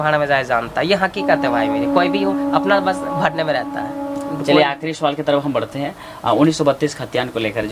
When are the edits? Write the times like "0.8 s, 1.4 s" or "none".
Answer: none